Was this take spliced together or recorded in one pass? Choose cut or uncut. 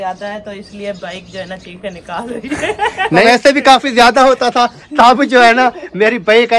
cut